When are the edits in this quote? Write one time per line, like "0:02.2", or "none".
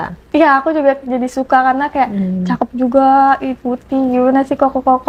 none